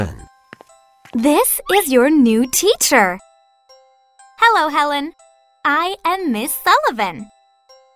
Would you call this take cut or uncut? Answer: uncut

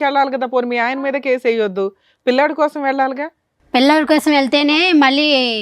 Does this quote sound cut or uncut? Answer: uncut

